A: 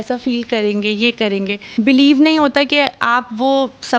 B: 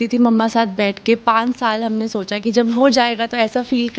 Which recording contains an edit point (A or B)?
A